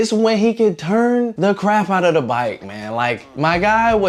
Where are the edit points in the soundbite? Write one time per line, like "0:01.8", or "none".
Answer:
none